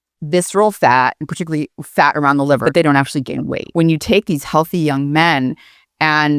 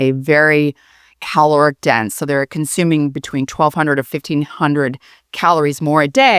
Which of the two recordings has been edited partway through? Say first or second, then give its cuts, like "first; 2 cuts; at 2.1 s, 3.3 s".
first; 2 cuts; at 2.6 s, 3.6 s